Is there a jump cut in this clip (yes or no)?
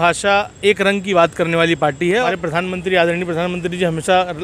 yes